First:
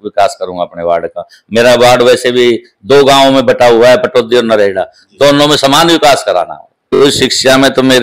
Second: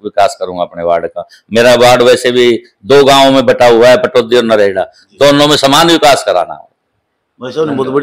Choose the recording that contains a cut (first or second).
first